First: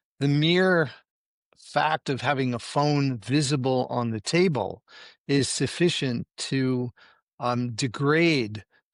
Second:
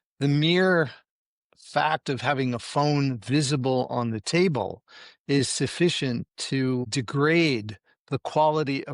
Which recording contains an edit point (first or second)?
second